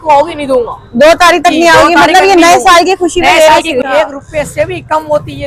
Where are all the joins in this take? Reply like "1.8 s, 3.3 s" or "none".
3.9 s